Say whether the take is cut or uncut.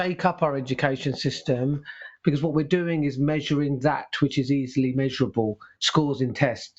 cut